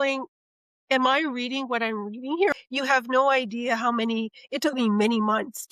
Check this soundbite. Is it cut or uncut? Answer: cut